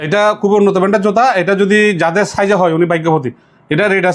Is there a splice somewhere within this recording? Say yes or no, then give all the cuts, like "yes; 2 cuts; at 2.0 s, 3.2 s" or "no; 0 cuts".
no; 0 cuts